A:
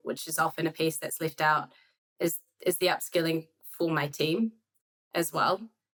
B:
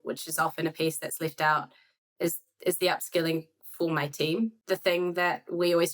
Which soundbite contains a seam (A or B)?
B